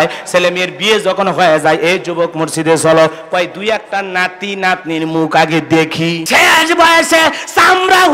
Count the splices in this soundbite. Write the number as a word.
one